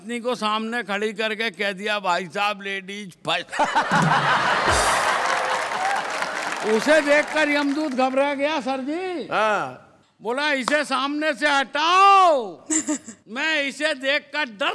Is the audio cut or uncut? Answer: uncut